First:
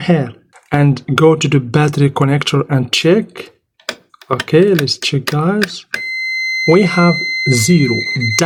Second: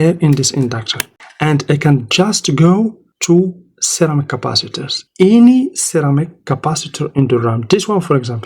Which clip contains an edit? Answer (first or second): second